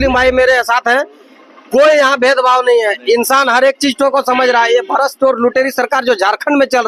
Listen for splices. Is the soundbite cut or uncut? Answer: uncut